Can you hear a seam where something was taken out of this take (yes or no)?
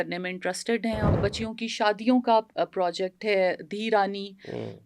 yes